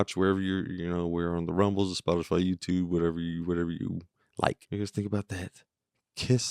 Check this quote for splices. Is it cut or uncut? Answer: cut